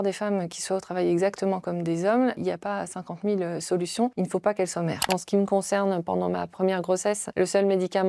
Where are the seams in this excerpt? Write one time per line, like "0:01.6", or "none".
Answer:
0:02.4
0:04.1
0:05.1
0:07.2